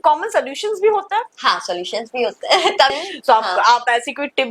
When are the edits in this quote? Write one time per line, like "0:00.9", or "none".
0:02.9

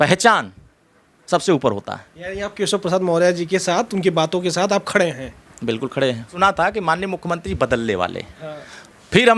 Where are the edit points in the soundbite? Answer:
0:06.3

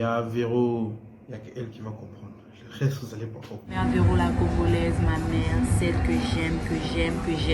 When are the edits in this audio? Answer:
0:03.7

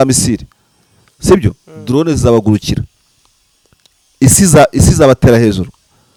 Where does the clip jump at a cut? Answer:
none

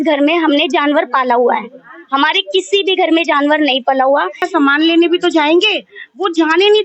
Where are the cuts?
0:04.5

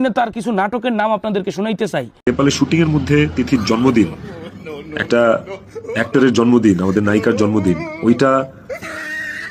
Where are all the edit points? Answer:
0:02.1

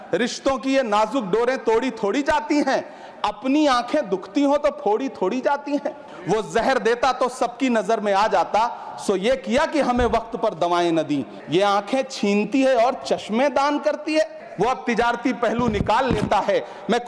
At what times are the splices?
0:06.1
0:11.3
0:14.4

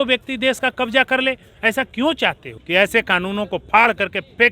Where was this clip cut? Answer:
0:02.5

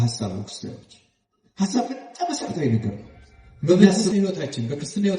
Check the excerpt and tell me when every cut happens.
0:04.1

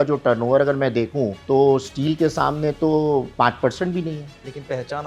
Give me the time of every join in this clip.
0:01.4
0:03.3

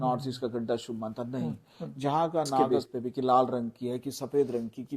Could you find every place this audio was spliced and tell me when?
0:02.7

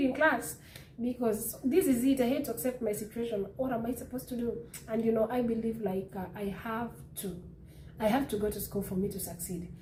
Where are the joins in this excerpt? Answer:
none

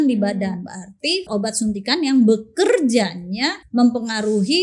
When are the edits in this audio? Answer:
0:01.3
0:03.6

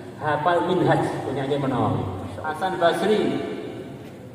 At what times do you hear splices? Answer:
0:02.5

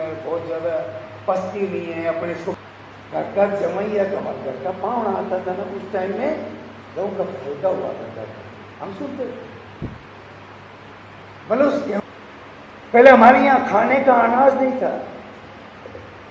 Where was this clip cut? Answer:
0:02.6
0:12.0

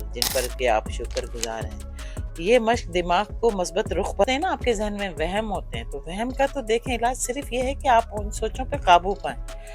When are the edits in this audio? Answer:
0:04.2

